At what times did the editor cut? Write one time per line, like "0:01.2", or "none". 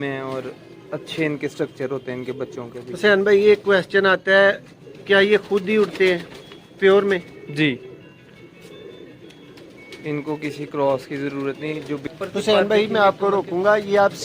0:12.0